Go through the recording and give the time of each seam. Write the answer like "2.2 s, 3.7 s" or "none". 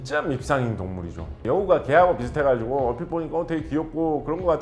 1.4 s

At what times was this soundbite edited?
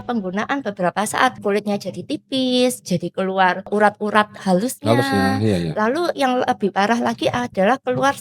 1.4 s, 3.7 s

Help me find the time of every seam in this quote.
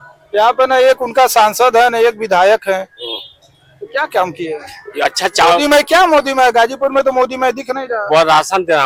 none

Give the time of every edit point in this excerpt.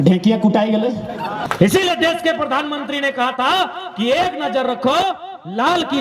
1.4 s

